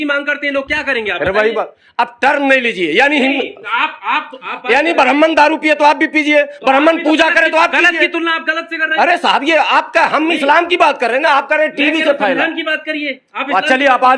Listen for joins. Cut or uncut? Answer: uncut